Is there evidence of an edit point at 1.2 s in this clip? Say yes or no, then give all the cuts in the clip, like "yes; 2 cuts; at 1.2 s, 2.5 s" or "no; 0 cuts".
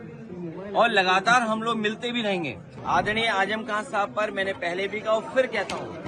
no; 1 cut; at 2.7 s